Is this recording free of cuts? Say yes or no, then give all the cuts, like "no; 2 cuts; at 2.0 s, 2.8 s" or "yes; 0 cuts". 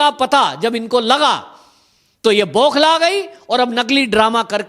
yes; 0 cuts